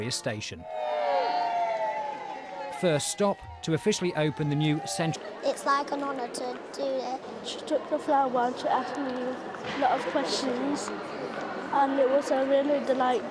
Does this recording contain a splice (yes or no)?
no